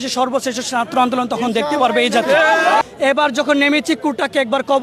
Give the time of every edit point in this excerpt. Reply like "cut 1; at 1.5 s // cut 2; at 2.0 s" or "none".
cut 1; at 2.8 s